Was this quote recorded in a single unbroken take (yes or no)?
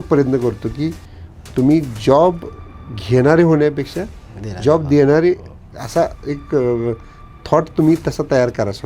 yes